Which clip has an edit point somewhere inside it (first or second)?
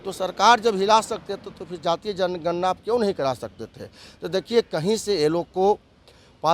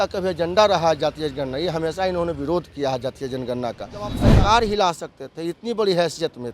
second